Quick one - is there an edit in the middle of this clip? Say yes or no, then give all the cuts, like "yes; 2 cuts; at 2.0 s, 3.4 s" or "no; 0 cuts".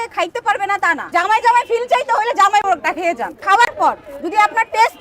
yes; 2 cuts; at 1.1 s, 3.4 s